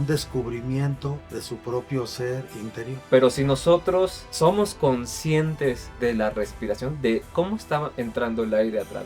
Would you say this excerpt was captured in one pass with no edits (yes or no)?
no